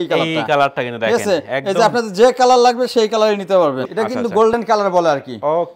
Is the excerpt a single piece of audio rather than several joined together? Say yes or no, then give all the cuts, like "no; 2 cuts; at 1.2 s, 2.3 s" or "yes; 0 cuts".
no; 1 cut; at 3.8 s